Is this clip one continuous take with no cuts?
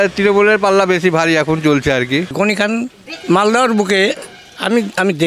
no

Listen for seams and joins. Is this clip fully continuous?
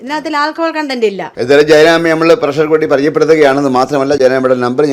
no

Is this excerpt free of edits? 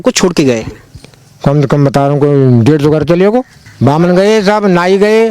no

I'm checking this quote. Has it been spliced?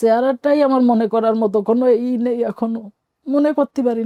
no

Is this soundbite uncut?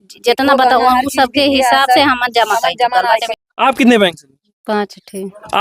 no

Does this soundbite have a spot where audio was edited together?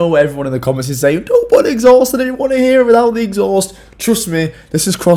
no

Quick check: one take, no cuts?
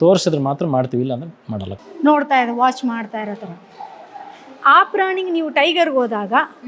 no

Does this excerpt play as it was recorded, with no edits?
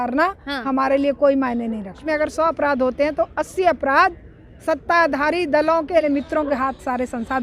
no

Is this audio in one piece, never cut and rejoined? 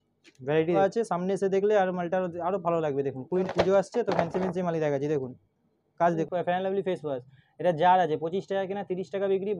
no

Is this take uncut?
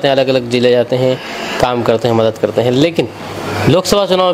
yes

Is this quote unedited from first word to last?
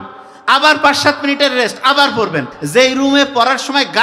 no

